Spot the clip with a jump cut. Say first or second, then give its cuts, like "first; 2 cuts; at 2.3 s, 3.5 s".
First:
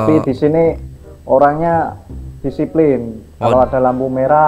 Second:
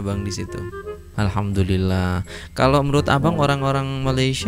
second; 1 cut; at 1.0 s